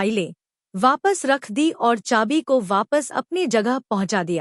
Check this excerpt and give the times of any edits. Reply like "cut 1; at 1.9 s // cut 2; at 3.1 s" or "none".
none